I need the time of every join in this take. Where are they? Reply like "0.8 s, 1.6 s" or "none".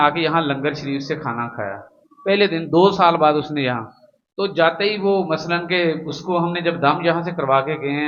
none